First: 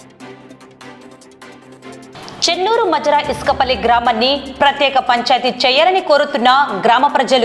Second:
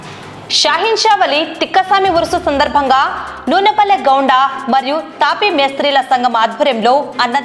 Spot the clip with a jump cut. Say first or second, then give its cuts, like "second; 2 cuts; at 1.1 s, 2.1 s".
first; 1 cut; at 2.0 s